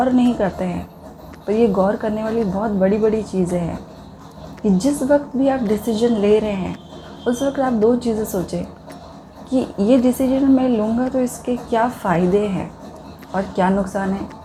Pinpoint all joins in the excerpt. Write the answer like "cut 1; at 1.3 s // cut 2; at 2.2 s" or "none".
none